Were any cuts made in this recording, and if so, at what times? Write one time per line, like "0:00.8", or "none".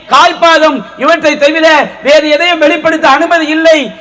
none